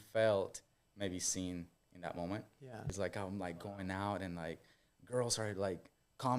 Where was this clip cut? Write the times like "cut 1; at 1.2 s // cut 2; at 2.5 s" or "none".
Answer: cut 1; at 2.9 s